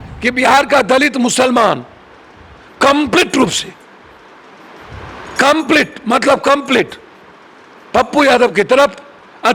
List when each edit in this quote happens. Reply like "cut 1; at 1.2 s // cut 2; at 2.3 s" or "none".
none